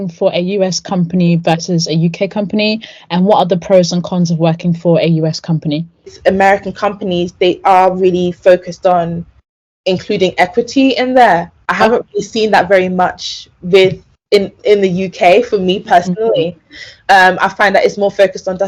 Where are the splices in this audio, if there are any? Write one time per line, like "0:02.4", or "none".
0:06.1